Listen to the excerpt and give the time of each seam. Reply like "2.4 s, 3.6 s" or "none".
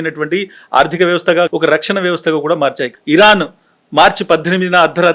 1.5 s, 2.9 s